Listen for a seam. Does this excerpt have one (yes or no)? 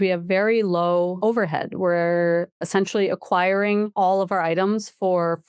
yes